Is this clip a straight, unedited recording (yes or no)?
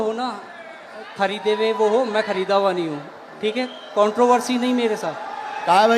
yes